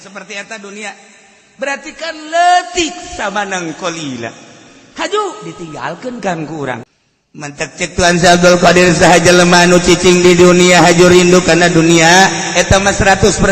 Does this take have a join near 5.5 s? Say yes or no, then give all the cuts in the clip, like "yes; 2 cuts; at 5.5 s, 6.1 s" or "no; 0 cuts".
no; 1 cut; at 6.8 s